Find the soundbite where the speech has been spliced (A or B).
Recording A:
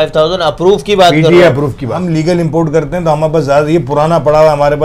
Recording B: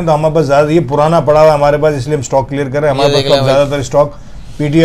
A